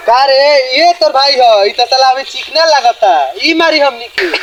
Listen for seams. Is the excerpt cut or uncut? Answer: uncut